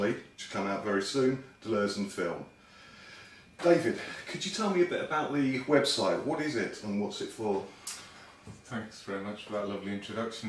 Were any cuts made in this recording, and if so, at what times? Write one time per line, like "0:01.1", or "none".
0:05.4